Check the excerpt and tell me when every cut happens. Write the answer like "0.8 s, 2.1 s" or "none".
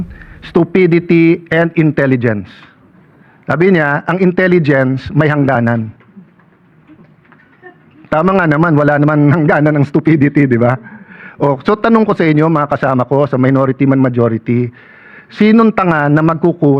none